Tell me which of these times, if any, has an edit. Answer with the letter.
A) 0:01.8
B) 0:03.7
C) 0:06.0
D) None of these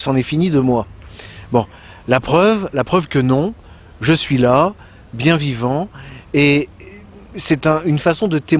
C